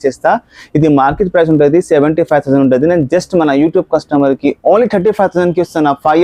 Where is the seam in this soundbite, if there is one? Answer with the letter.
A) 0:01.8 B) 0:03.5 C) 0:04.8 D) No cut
D